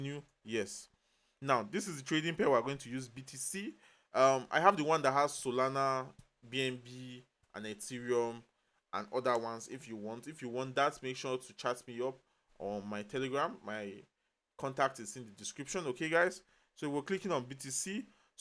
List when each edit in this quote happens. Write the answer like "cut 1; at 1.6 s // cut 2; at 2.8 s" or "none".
none